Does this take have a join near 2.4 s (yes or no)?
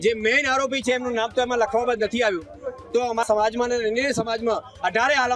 no